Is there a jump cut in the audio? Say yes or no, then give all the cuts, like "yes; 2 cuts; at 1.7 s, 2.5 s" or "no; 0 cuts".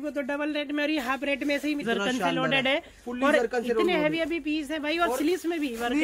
yes; 1 cut; at 1.8 s